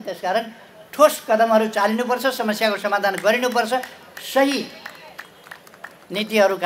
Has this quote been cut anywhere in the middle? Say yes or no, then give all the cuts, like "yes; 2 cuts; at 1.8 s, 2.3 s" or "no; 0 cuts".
no; 0 cuts